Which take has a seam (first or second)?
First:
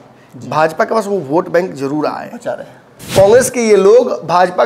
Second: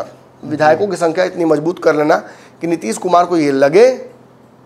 first